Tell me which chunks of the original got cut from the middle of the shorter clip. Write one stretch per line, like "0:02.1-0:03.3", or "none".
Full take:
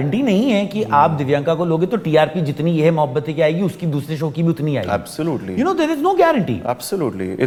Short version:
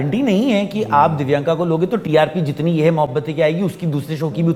none

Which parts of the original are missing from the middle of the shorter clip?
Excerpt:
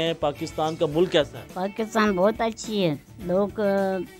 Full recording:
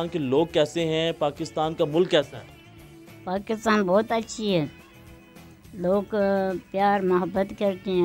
0:02.4-0:03.1
0:04.8-0:05.6

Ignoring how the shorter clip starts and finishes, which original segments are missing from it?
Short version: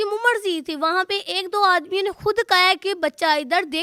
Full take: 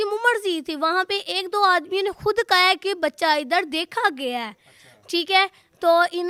none

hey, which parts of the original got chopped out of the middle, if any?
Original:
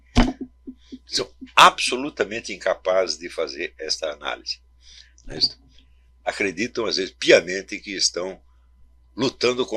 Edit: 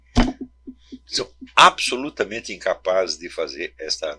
none

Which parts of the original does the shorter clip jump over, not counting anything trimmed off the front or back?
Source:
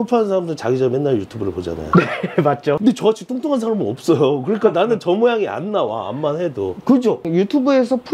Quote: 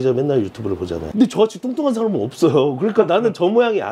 0:01.9-0:02.8

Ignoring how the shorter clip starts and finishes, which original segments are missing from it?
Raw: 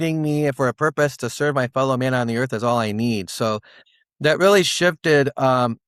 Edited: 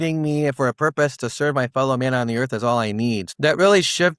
0:03.3-0:04.1

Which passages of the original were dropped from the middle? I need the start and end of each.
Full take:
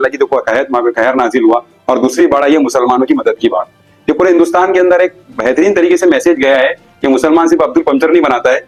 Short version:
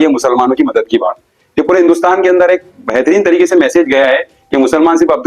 none

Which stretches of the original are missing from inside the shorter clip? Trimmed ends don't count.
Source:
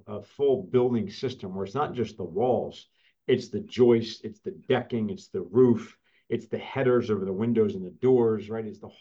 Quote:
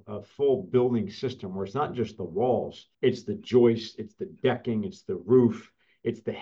0:02.8-0:03.1

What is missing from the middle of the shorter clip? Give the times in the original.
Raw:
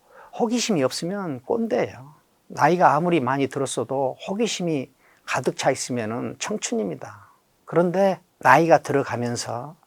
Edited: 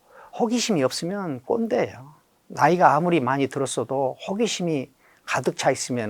none

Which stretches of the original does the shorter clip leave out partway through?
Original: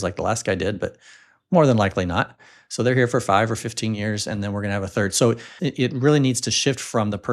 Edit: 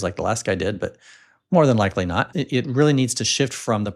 0:02.3-0:05.6

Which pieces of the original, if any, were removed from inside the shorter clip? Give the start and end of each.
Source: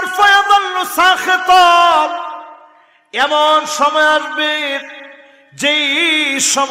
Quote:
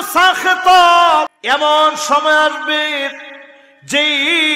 0:02.2-0:03.1

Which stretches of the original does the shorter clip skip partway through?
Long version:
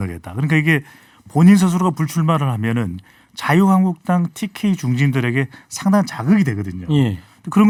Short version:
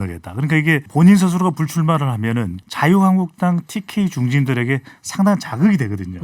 0:00.9-0:01.3
0:03.0-0:03.3

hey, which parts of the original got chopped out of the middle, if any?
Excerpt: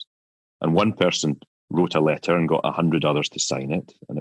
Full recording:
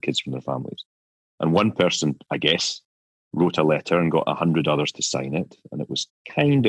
0:02.3-0:03.1

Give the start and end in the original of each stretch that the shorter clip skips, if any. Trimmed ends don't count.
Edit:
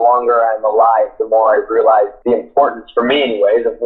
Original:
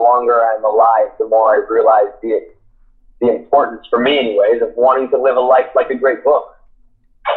0:02.1-0:03.1

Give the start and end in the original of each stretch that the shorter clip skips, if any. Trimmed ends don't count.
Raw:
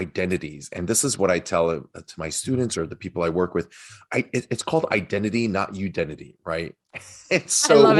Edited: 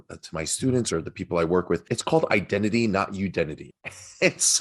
0:03.8-0:04.5
0:06.3-0:06.8

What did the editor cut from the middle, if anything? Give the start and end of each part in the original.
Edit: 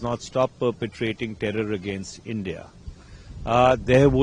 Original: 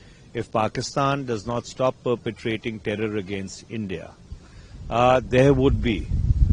none

